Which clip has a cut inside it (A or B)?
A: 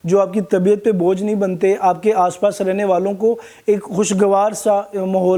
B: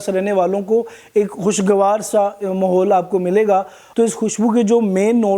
B